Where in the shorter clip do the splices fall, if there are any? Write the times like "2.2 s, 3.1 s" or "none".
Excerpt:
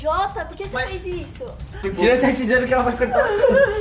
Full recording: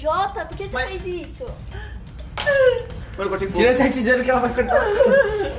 1.8 s